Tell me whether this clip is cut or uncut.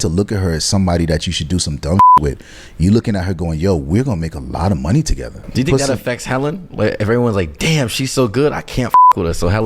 cut